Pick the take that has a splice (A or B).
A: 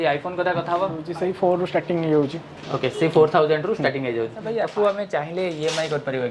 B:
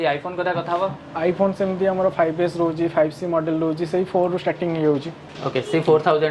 A